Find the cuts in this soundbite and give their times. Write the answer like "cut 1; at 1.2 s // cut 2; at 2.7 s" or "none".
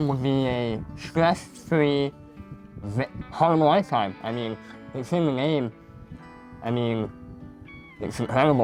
none